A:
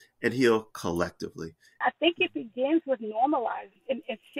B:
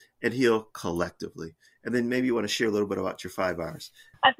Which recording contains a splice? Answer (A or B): A